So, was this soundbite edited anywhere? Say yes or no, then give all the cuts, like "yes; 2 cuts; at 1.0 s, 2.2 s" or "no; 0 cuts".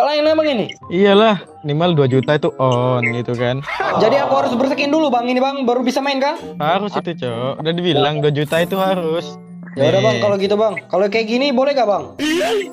yes; 4 cuts; at 1.6 s, 3.9 s, 6.5 s, 10.8 s